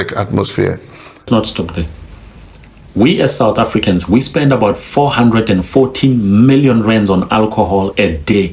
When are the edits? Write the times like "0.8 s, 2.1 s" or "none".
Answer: 1.3 s